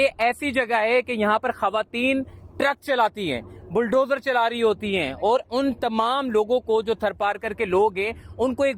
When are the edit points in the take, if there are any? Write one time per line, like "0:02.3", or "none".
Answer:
none